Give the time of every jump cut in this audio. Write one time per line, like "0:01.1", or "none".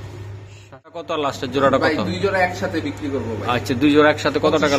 0:01.1